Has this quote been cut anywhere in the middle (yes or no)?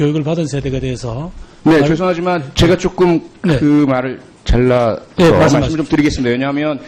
no